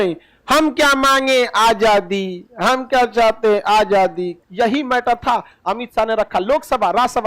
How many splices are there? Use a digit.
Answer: 1